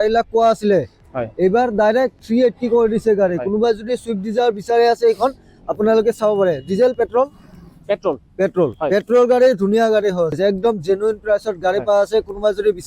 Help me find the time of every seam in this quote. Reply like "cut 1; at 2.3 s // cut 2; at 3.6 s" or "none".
cut 1; at 10.4 s